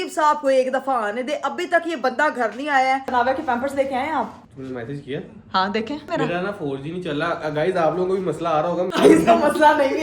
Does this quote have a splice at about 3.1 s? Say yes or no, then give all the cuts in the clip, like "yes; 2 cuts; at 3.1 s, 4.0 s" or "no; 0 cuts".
yes; 3 cuts; at 3.1 s, 6.1 s, 8.9 s